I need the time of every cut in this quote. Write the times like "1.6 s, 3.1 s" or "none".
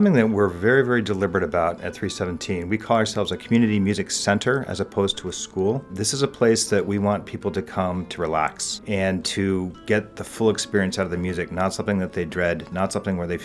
3.4 s, 6.0 s, 8.7 s